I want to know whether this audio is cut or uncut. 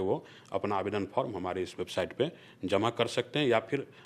uncut